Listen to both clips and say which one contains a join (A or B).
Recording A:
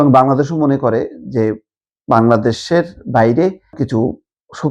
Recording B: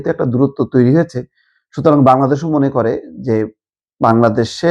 A